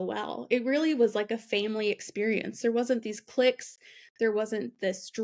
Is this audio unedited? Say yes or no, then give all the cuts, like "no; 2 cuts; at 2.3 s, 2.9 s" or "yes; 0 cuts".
yes; 0 cuts